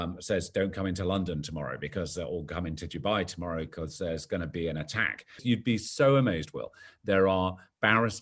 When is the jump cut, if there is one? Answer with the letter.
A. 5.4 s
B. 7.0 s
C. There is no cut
A